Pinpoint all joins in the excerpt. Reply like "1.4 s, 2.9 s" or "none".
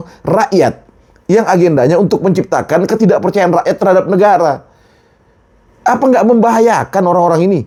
none

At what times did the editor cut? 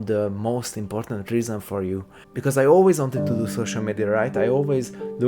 2.0 s

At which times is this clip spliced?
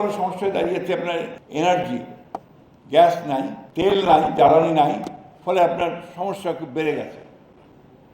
1.4 s, 3.6 s

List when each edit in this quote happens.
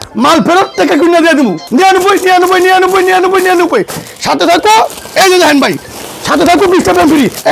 1.6 s

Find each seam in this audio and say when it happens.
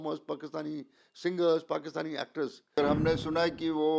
2.8 s

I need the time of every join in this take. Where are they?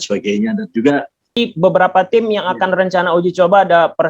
1.3 s

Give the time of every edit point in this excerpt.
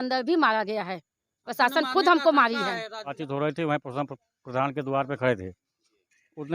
3.2 s

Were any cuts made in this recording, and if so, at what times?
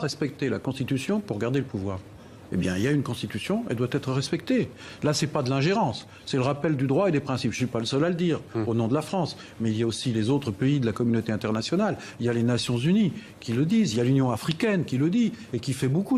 12.1 s

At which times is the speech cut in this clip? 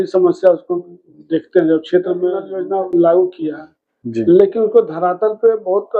2.5 s

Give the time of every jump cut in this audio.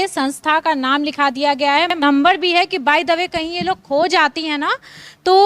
1.9 s

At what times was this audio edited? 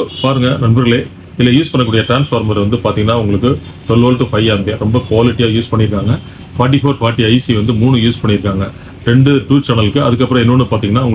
none

